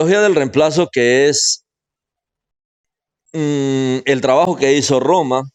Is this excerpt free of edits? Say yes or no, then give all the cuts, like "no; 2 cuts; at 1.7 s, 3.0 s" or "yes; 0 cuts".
yes; 0 cuts